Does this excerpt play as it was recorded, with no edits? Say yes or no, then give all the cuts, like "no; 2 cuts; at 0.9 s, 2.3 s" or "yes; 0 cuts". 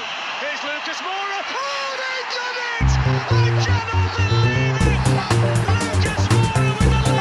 yes; 0 cuts